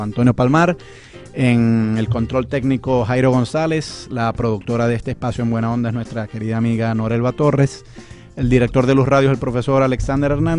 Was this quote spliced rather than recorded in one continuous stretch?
no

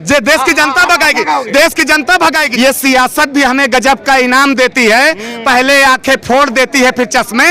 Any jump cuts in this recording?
yes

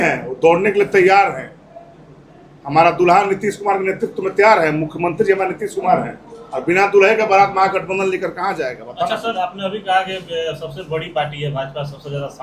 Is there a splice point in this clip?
no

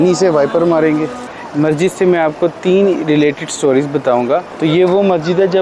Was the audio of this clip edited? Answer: yes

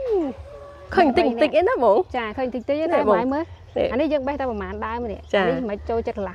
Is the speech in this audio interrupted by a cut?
no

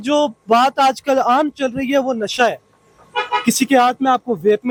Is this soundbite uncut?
yes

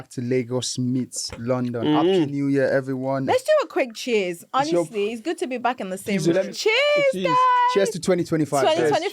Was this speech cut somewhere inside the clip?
yes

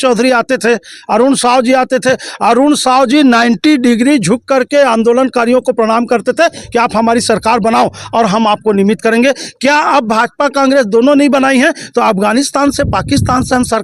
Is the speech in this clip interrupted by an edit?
no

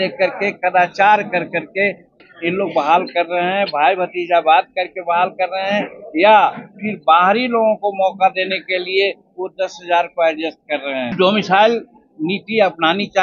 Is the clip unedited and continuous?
no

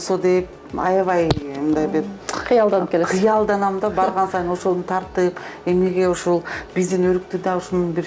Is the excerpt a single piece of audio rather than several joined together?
yes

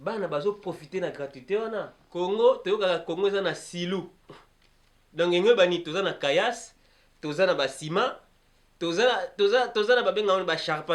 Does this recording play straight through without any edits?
no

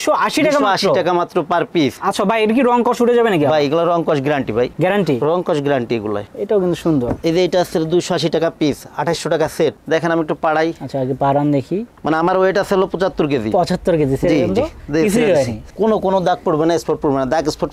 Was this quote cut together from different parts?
yes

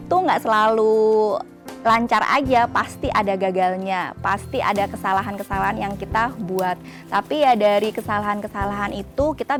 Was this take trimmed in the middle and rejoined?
no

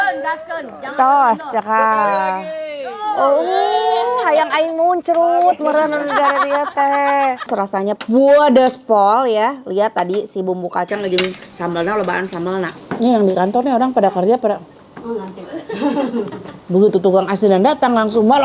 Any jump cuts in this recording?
yes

